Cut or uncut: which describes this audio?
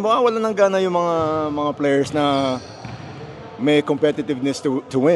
uncut